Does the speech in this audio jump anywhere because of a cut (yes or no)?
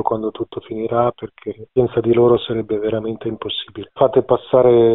yes